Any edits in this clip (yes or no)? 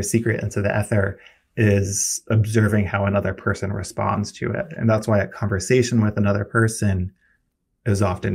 no